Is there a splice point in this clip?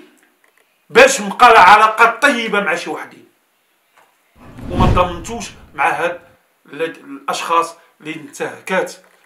yes; 1 cut; at 4.6 s

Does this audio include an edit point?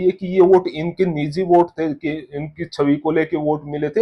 no; 0 cuts

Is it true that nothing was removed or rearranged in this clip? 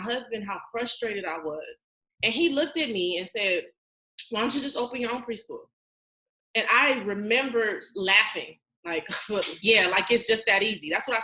yes; 0 cuts

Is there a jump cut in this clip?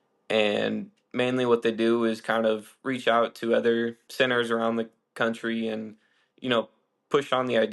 yes; 1 cut; at 4.0 s

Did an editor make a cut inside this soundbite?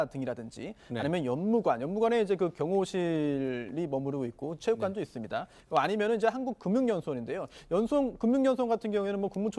no; 0 cuts

